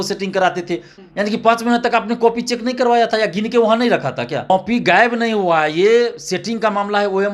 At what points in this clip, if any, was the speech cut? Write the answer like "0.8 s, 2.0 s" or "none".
0.9 s, 4.5 s

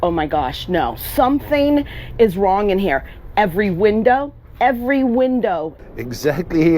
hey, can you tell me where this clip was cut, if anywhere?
5.7 s

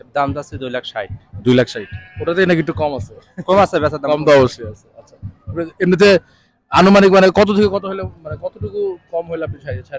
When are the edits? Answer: none

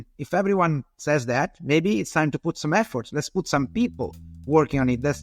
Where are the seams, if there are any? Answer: none

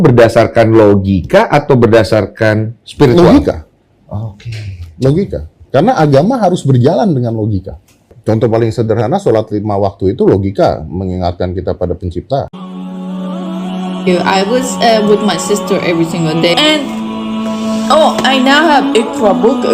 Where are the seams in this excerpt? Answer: 12.6 s

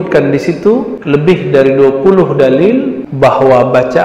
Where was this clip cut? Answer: 0.9 s, 3.0 s

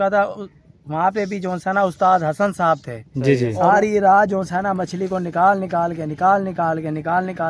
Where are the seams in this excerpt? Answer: 3.6 s

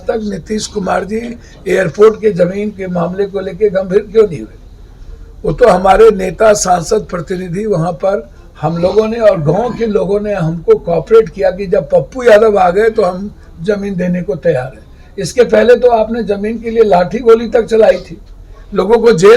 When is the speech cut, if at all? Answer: none

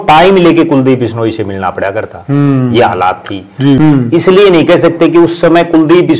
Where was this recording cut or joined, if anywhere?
3.8 s

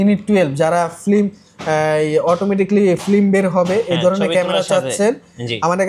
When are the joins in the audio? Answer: none

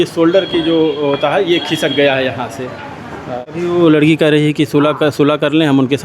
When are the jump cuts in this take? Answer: 3.3 s

